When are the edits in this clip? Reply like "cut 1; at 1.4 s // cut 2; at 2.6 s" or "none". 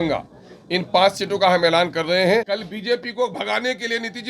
cut 1; at 2.5 s